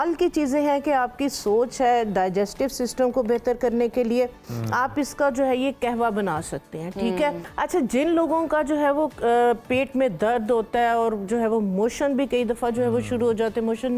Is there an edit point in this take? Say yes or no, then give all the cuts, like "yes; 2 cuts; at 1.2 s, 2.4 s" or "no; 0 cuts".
yes; 1 cut; at 7.5 s